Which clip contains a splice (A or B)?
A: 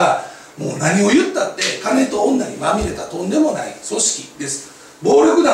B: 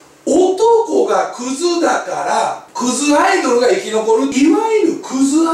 B